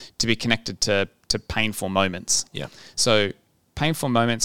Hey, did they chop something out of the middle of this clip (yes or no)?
no